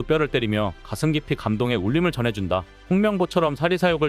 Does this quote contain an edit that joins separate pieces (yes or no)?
yes